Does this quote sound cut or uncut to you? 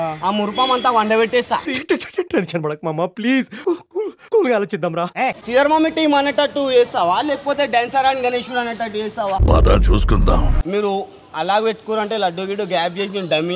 cut